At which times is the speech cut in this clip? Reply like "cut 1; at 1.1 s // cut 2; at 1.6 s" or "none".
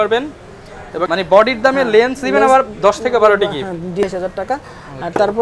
cut 1; at 1.0 s // cut 2; at 4.0 s